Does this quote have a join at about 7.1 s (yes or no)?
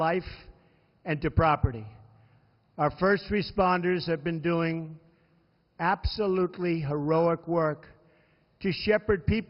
yes